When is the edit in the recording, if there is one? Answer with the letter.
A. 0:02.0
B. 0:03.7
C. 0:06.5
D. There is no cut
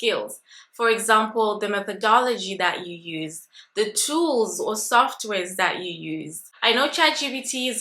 C